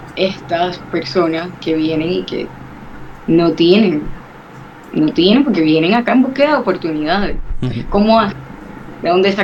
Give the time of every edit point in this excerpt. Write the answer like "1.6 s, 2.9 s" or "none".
none